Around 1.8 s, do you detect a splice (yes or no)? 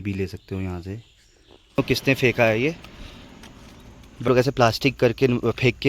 yes